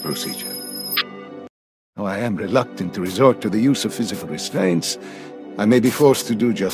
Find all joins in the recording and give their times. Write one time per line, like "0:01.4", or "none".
0:01.6